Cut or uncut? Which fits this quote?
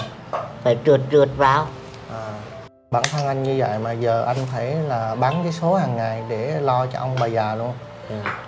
cut